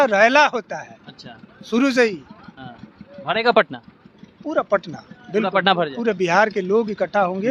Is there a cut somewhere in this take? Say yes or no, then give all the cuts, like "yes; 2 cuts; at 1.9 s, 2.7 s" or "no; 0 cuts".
no; 0 cuts